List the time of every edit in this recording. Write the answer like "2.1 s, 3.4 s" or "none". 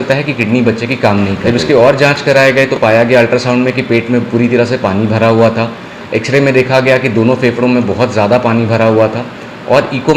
1.4 s